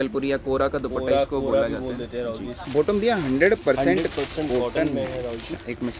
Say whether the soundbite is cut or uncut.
cut